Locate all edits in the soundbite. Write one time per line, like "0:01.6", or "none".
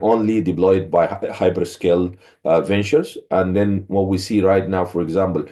none